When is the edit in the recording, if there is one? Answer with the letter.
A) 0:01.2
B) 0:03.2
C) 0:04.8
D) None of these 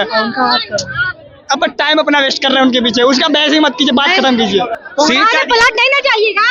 C